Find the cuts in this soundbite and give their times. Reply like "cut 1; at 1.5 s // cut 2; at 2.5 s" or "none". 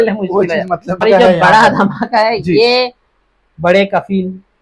cut 1; at 1.0 s